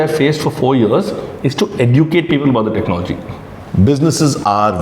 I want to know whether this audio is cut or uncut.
cut